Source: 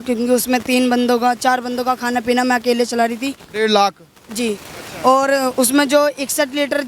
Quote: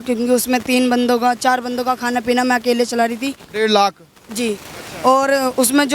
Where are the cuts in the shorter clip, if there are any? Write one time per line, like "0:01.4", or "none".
none